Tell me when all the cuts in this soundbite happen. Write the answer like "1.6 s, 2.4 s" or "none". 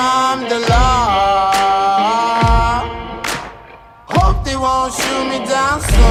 none